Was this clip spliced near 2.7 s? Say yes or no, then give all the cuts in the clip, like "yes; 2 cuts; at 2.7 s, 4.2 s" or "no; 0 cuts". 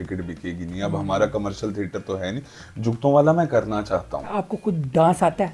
no; 1 cut; at 4.3 s